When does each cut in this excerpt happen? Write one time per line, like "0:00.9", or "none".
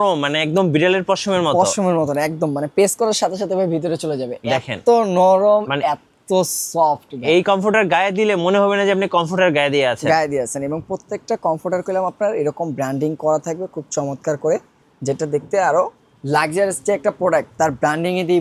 none